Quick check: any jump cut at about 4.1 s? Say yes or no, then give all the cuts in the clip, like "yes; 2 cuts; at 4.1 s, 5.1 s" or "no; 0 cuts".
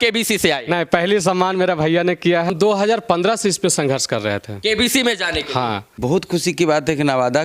no; 2 cuts; at 2.5 s, 6.0 s